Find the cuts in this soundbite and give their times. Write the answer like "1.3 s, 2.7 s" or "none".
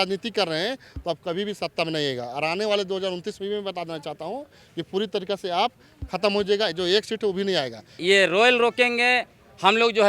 8.0 s